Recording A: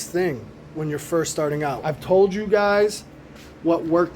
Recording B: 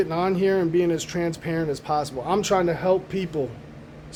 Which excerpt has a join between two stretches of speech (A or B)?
A